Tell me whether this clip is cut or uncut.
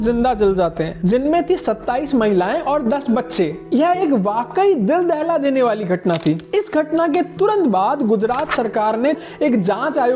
uncut